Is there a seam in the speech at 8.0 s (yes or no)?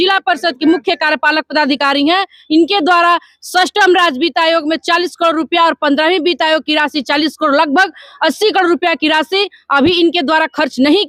no